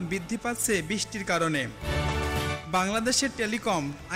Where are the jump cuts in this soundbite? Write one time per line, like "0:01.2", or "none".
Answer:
none